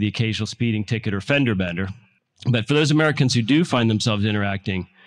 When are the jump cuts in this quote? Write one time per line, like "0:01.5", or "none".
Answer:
0:01.6